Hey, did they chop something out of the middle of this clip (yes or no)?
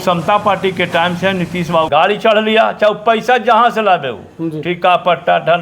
yes